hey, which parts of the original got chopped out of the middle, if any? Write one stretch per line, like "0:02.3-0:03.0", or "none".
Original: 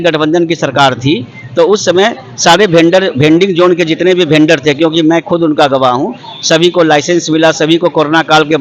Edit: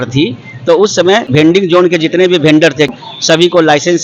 0:02.3-0:03.3
0:04.8-0:06.1